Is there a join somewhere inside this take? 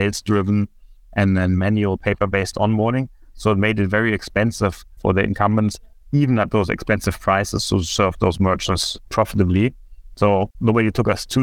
yes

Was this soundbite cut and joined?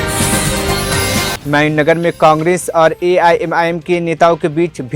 no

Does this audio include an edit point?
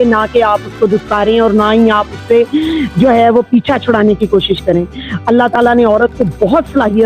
no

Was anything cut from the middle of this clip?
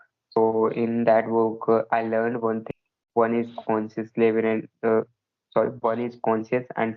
yes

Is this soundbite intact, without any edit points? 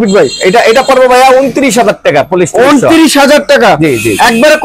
yes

